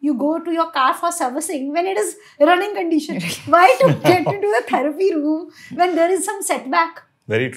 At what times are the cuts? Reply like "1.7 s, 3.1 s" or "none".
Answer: none